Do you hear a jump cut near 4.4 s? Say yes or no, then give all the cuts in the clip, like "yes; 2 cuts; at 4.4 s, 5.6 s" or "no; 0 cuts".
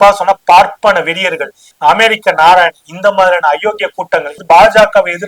yes; 2 cuts; at 1.7 s, 4.4 s